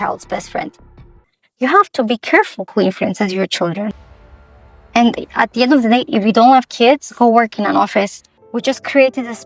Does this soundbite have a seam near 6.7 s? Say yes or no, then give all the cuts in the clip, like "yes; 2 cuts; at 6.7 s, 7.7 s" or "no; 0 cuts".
no; 3 cuts; at 1.3 s, 4.0 s, 8.3 s